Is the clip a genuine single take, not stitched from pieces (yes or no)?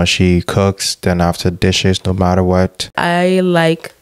no